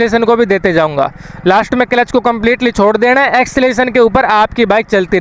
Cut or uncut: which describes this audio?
uncut